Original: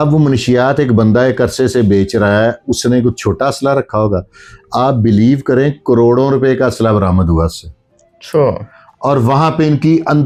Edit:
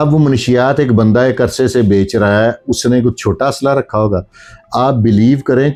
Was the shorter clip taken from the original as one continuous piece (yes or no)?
yes